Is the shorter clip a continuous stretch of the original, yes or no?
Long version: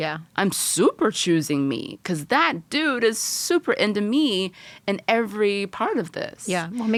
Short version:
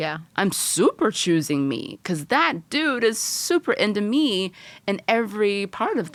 yes